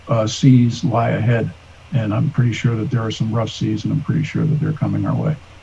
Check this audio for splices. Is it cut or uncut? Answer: uncut